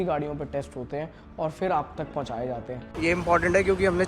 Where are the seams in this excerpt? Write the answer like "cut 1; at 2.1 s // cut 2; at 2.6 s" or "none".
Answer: cut 1; at 2.9 s